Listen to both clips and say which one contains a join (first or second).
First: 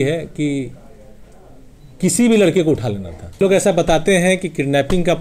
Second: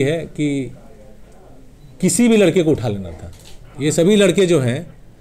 first